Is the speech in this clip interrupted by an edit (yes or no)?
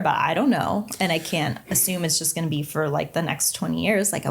yes